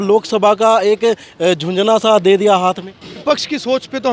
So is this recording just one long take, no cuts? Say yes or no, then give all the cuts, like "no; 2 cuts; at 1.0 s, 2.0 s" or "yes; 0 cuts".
no; 1 cut; at 3.2 s